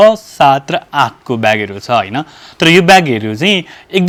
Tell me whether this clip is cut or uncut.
uncut